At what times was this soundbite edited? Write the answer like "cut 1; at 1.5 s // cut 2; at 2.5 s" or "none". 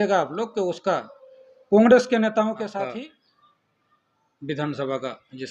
cut 1; at 2.9 s